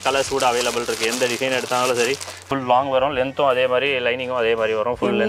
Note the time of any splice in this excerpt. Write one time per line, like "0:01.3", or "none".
0:02.3